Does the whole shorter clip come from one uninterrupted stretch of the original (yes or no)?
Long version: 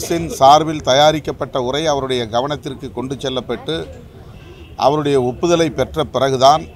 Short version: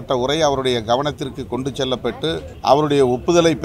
no